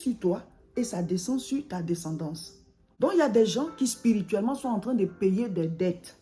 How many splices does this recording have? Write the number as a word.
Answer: one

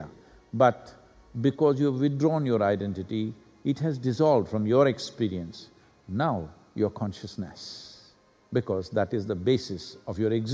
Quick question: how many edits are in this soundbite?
zero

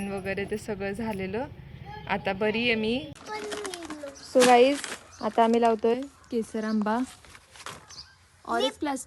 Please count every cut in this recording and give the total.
one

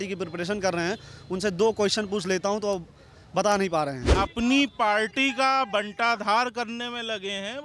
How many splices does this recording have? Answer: one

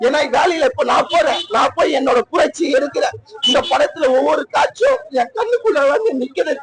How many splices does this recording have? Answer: zero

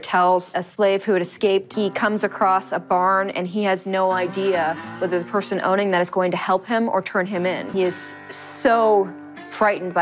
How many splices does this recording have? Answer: zero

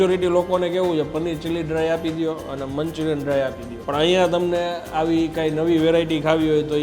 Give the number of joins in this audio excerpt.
one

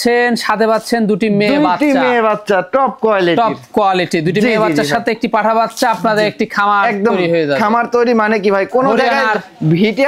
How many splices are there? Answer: zero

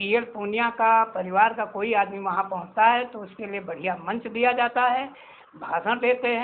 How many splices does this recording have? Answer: zero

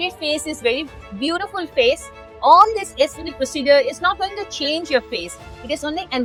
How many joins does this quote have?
zero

